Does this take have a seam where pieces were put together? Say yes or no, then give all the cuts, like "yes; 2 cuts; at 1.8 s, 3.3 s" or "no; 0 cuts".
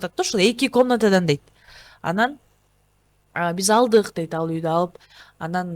no; 0 cuts